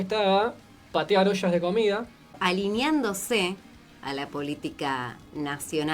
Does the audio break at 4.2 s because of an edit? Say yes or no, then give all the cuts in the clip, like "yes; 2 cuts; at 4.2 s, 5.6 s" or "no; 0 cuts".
no; 1 cut; at 2.2 s